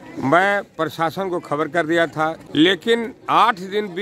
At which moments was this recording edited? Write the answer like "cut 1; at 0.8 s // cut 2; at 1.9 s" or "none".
cut 1; at 2.4 s